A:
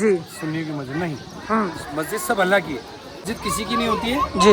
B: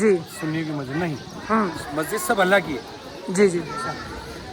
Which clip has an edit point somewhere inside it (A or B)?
A